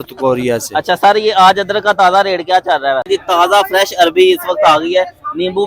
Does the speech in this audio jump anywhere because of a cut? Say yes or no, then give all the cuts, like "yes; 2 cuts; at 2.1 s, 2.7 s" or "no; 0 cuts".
yes; 1 cut; at 3.1 s